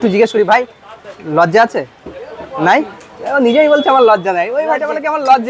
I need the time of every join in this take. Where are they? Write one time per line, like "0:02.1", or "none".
none